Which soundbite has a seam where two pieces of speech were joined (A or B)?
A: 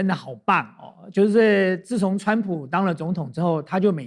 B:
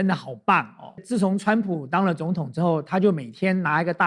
B